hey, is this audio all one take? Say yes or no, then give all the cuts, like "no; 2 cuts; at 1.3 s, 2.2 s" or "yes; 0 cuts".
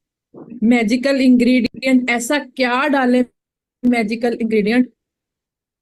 yes; 0 cuts